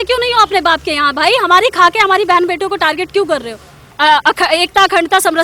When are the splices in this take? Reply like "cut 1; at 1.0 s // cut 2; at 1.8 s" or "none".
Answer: cut 1; at 4.0 s